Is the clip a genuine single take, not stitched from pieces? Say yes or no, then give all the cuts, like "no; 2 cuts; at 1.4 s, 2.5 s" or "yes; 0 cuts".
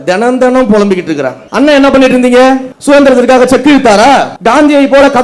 no; 3 cuts; at 1.4 s, 2.7 s, 4.3 s